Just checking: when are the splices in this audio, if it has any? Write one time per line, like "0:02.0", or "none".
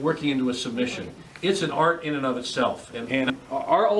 0:02.9